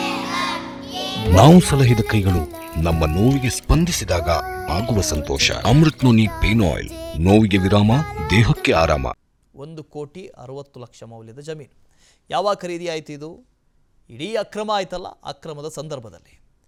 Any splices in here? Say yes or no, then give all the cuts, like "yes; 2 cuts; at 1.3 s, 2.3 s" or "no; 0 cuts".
no; 0 cuts